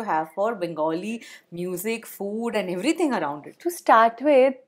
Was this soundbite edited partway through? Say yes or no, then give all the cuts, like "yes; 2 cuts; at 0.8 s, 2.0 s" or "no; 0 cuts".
no; 0 cuts